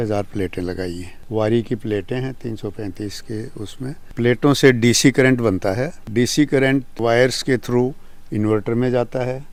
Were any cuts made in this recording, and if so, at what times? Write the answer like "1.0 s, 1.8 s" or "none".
none

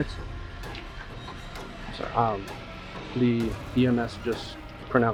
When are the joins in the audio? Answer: none

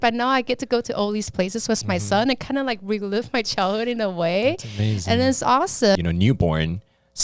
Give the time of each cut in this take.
6.0 s

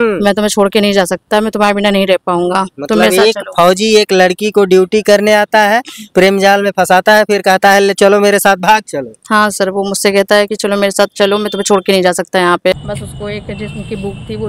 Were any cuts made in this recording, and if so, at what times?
12.8 s

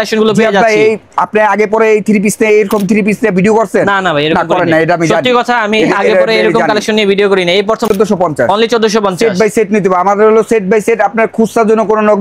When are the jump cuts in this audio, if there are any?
7.9 s

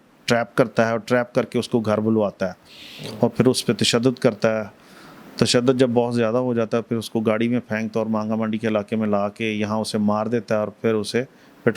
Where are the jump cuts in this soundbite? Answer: none

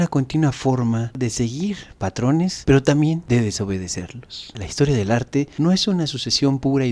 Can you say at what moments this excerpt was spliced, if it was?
1.1 s, 4.4 s

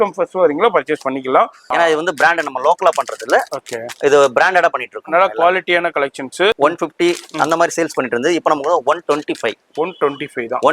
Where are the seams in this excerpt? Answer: 1.6 s, 6.6 s

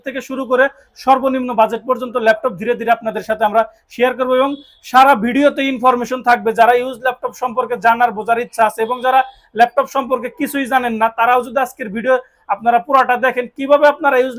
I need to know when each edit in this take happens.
none

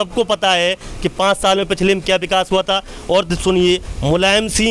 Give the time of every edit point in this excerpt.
none

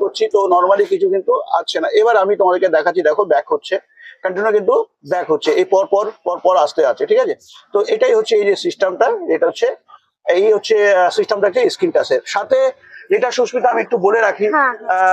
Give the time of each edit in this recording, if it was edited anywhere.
none

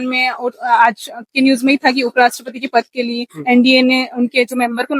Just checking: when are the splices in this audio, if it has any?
none

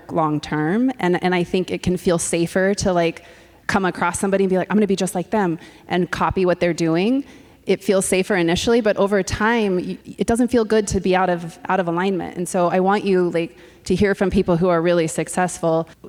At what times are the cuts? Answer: none

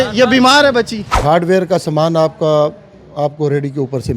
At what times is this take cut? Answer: 1.2 s

